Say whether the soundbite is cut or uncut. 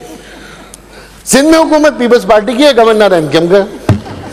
uncut